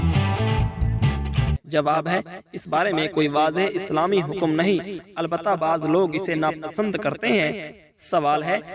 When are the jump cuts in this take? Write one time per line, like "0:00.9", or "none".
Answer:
0:01.6